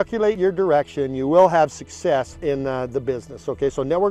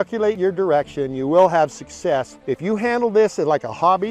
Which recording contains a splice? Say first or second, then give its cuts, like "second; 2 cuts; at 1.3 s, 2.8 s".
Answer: second; 1 cut; at 2.3 s